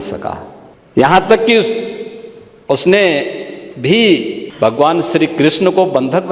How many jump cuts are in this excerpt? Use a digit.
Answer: 1